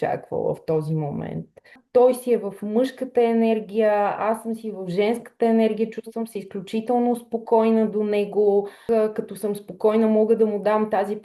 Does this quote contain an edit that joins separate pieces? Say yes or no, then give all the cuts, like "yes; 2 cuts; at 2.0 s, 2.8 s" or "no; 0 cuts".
yes; 2 cuts; at 1.8 s, 8.8 s